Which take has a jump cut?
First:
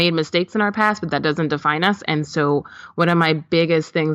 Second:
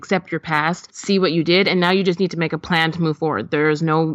second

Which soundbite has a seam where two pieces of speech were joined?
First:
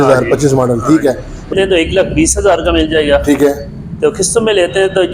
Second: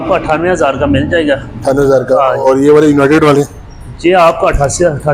first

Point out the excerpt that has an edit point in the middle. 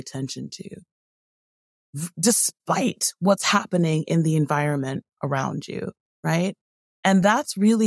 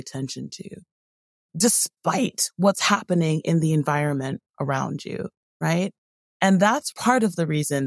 second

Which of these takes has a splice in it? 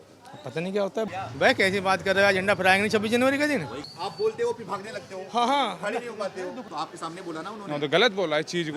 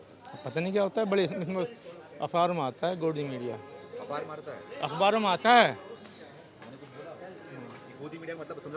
first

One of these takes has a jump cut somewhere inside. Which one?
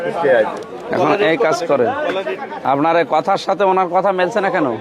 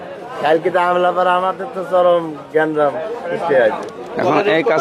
first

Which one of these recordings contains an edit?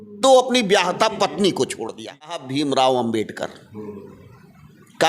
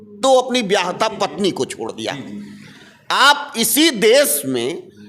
first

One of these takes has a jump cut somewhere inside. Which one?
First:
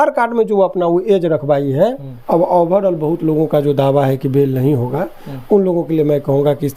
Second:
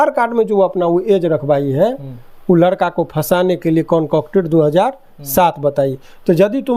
first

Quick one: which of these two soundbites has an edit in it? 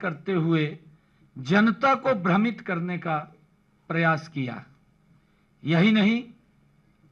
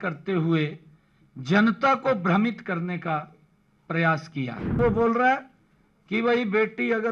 second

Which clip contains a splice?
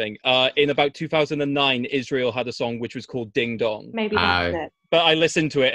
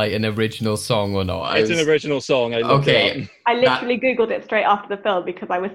first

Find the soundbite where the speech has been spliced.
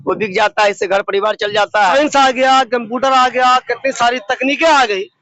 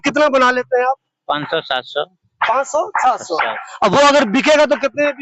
first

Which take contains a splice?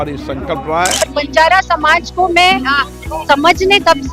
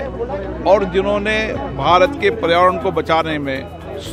first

